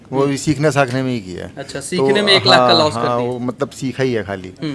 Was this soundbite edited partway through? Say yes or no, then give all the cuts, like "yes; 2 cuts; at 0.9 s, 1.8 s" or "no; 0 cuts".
no; 0 cuts